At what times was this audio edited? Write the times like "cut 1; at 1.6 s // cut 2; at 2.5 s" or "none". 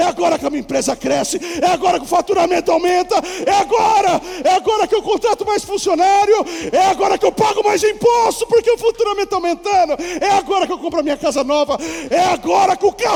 none